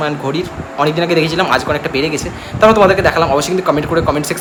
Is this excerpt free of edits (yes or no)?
yes